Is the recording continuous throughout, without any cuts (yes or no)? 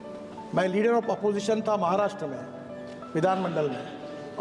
yes